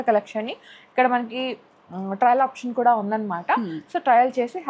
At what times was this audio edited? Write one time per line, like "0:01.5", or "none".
none